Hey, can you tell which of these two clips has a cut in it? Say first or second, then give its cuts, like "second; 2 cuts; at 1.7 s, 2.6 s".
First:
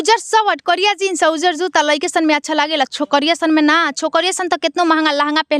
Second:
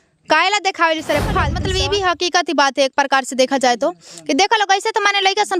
second; 1 cut; at 1.6 s